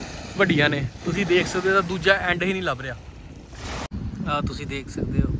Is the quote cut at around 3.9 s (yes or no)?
yes